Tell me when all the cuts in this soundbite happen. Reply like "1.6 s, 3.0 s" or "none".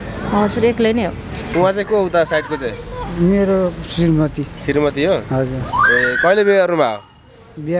1.4 s